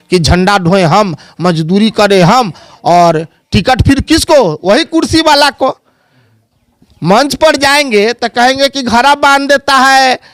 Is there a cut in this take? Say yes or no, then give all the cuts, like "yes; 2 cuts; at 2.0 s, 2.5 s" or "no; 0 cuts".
no; 0 cuts